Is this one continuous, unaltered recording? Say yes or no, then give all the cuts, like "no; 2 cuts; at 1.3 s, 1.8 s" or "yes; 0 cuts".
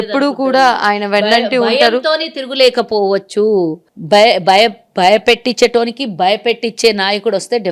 yes; 0 cuts